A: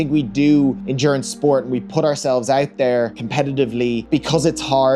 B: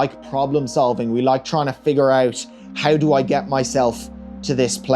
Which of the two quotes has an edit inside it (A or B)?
A